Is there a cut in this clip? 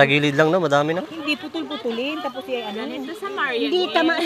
no; 0 cuts

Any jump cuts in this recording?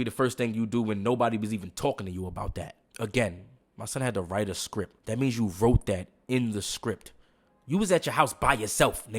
yes; 2 cuts; at 2.8 s, 5.0 s

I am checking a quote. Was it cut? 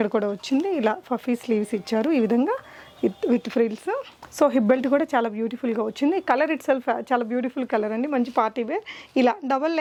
no; 0 cuts

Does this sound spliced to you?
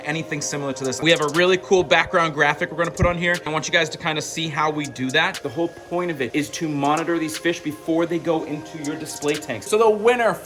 yes; 5 cuts; at 1.0 s, 3.5 s, 5.4 s, 6.3 s, 9.7 s

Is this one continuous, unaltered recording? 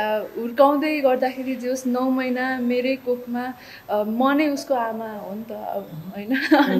yes; 0 cuts

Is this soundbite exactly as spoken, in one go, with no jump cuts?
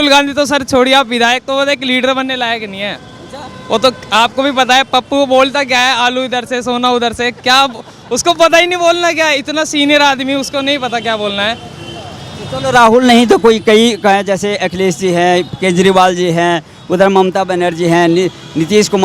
yes; 0 cuts

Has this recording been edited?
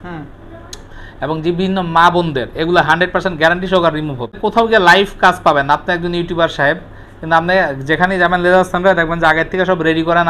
yes; 1 cut; at 4.4 s

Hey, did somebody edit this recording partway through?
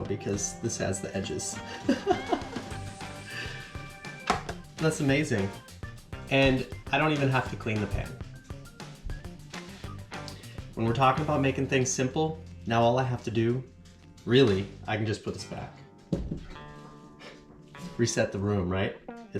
yes; 2 cuts; at 2.4 s, 4.2 s

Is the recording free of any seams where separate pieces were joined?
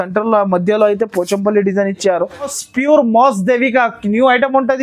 no; 1 cut; at 2.6 s

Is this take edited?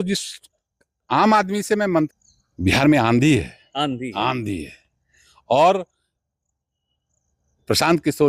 yes; 1 cut; at 2.1 s

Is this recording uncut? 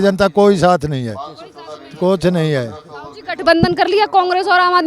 yes; 0 cuts

